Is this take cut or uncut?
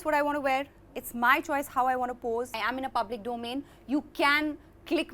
cut